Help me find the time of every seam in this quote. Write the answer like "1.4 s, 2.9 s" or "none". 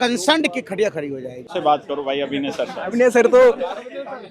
1.5 s

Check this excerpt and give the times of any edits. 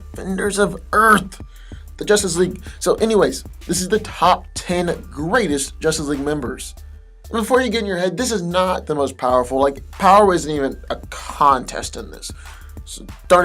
6.0 s

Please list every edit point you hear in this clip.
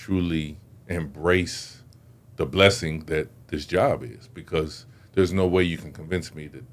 none

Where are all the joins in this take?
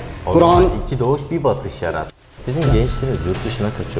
2.1 s

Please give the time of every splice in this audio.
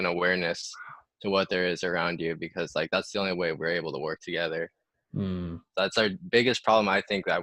none

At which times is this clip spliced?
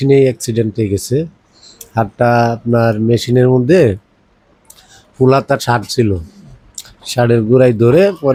none

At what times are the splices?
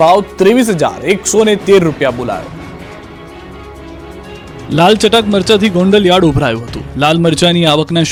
none

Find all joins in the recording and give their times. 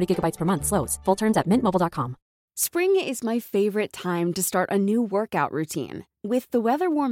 2.3 s

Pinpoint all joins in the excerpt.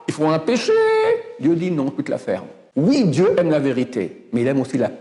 2.6 s

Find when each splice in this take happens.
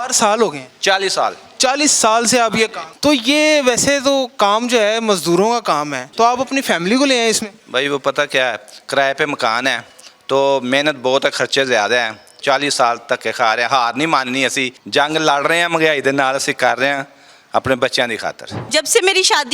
6.1 s, 12.3 s, 14.7 s, 18.7 s

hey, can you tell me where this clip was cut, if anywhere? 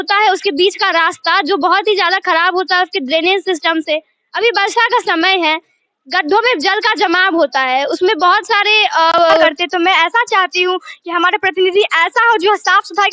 9.6 s

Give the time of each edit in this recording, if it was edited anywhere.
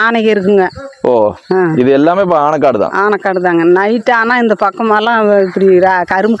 none

